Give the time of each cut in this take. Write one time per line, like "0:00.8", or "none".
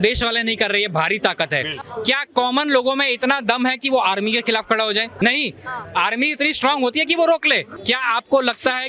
0:01.9
0:05.1
0:07.7